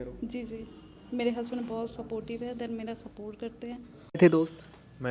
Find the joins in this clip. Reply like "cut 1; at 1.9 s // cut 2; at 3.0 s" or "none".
cut 1; at 4.2 s